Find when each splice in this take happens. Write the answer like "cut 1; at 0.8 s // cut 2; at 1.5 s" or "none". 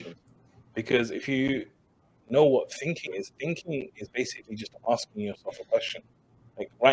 cut 1; at 2.1 s